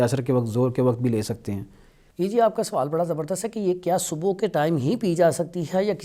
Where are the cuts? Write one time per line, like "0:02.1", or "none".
none

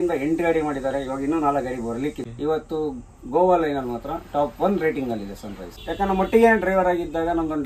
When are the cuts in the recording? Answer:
0:02.2
0:05.7

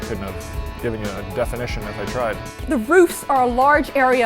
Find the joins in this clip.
0:02.7

